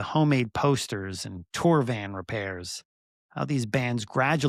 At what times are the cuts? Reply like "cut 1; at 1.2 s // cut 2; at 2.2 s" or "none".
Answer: none